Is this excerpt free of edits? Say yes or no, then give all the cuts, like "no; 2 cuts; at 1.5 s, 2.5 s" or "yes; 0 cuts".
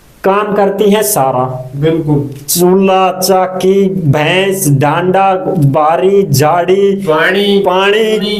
yes; 0 cuts